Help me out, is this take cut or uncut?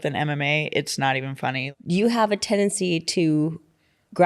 cut